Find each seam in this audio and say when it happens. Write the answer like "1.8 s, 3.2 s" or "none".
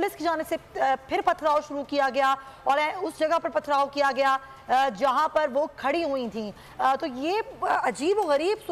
none